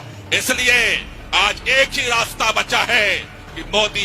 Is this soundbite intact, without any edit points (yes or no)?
yes